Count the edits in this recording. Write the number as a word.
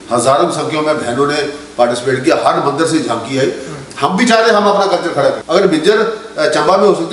zero